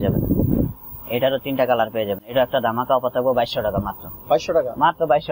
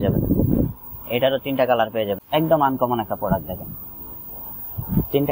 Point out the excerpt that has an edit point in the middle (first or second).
second